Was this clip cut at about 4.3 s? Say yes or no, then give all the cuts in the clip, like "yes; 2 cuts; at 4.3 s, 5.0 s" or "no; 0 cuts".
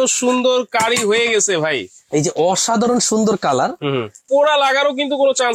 yes; 1 cut; at 4.3 s